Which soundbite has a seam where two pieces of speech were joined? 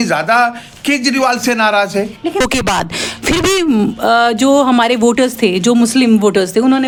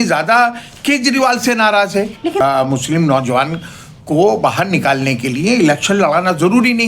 second; 1 cut; at 2.4 s

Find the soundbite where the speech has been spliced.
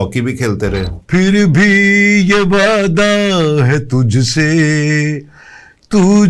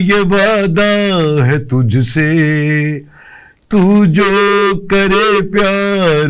first; 1 cut; at 0.9 s

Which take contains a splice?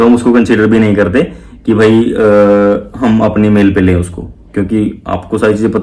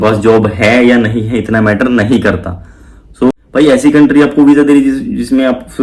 second; 1 cut; at 3.3 s

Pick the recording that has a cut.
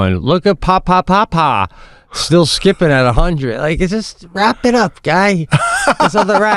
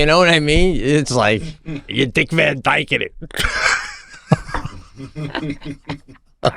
second; 1 cut; at 2.1 s

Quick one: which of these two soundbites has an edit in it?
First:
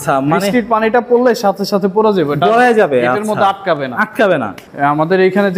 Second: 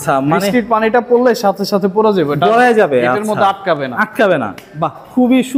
first; 1 cut; at 4.6 s

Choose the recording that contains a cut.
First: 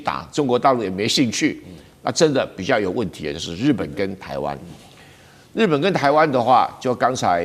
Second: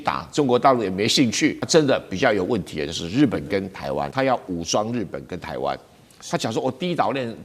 second; 2 cuts; at 1.6 s, 4.1 s

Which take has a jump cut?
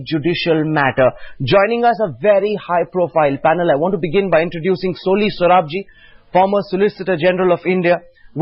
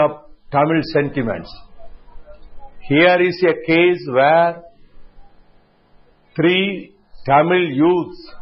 second; 1 cut; at 1.2 s

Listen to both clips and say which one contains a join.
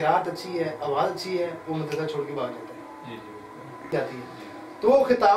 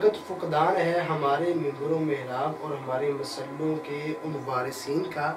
first; 1 cut; at 3.9 s

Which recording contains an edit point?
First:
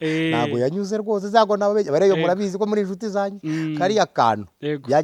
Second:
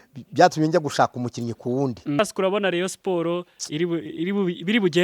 second; 1 cut; at 2.2 s

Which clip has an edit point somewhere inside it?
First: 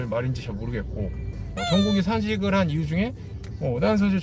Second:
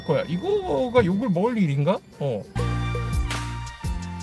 second; 1 cut; at 2.5 s

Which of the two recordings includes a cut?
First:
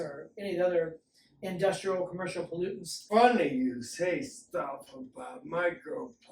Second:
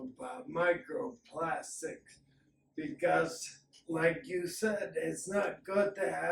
first; 1 cut; at 3.0 s

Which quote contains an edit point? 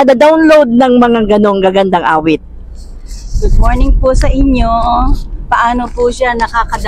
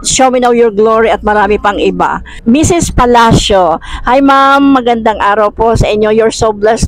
second; 1 cut; at 2.3 s

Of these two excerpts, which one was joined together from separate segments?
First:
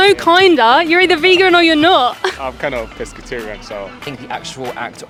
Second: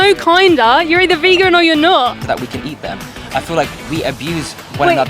second; 1 cut; at 2.2 s

